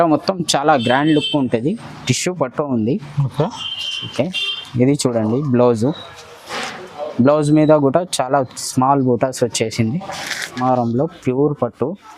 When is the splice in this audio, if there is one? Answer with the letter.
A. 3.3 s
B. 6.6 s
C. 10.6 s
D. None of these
C